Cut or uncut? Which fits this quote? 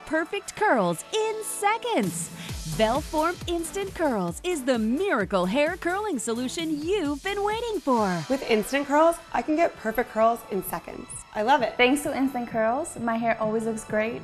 cut